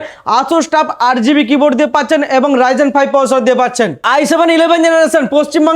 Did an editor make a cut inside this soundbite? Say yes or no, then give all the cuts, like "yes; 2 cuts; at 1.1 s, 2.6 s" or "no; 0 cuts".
yes; 1 cut; at 4.0 s